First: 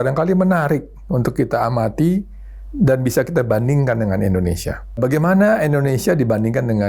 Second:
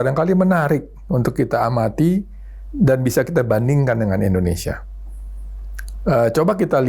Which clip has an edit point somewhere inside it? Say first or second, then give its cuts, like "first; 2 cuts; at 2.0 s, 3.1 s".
first; 1 cut; at 5.0 s